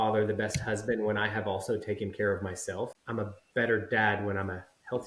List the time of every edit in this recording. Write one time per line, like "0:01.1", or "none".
0:03.0